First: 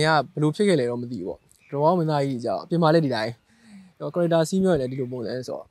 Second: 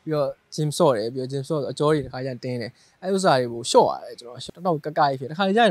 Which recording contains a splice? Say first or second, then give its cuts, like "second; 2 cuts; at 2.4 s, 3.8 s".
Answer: second; 1 cut; at 4.3 s